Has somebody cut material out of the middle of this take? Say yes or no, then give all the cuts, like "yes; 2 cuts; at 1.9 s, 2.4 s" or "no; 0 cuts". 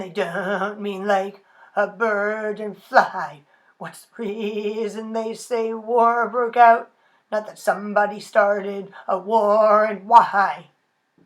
no; 0 cuts